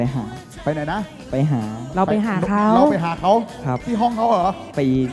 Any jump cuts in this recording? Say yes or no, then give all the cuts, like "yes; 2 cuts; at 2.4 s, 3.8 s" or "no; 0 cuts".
no; 0 cuts